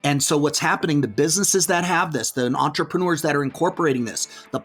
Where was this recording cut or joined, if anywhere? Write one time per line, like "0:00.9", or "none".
none